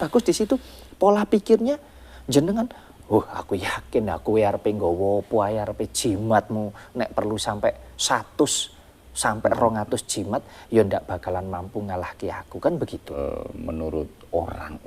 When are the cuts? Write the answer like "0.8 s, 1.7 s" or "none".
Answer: 13.2 s